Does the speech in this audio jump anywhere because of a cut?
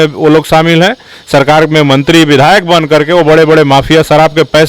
no; 0 cuts

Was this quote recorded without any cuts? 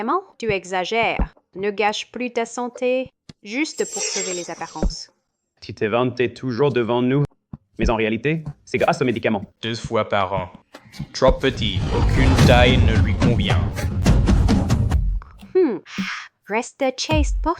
no; 1 cut; at 15.0 s

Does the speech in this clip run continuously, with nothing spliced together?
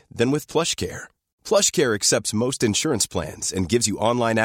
yes; 0 cuts

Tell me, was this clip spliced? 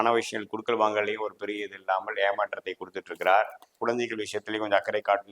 yes; 1 cut; at 3.8 s

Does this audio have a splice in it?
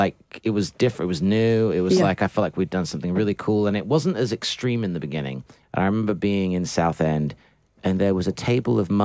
yes; 1 cut; at 5.5 s

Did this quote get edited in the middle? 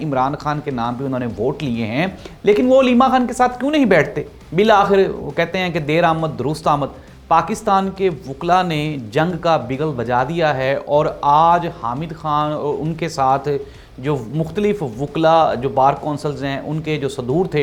yes; 1 cut; at 4.3 s

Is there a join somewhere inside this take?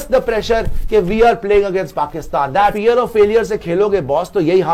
yes; 1 cut; at 2.8 s

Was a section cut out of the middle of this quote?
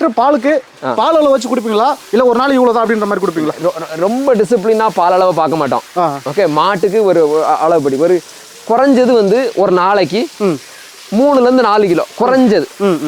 no; 0 cuts

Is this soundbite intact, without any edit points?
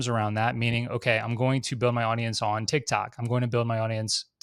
yes; 0 cuts

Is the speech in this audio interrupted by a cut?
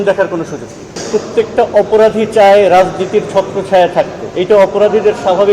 yes; 1 cut; at 1.0 s

